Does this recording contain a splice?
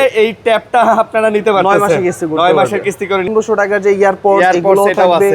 yes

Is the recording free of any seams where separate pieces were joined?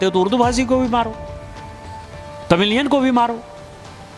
yes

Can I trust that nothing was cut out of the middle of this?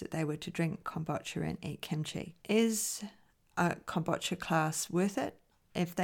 no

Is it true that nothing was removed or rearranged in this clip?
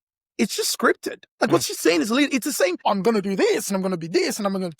no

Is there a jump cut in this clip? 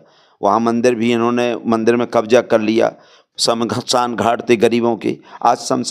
no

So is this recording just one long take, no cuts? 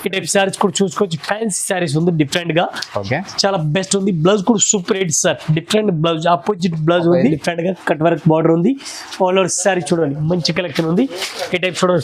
no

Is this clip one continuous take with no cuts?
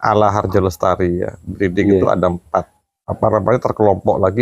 no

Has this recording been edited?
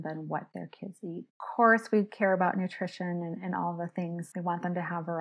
yes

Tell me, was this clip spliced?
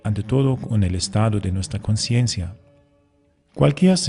yes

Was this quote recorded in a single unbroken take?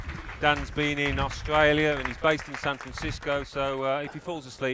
yes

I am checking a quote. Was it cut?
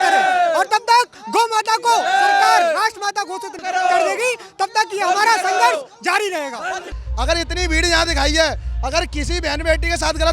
yes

